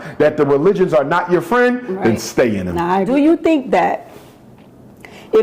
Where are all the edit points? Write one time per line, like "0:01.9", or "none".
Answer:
0:03.1